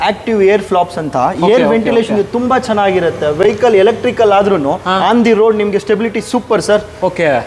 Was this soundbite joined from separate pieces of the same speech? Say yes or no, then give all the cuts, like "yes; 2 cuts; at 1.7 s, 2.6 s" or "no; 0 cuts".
no; 0 cuts